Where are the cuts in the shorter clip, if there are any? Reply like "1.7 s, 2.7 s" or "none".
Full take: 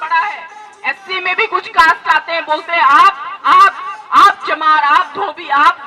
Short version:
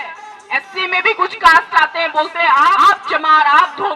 2.8 s